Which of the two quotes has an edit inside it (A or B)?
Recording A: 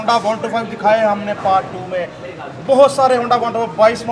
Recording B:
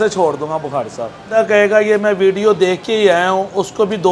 B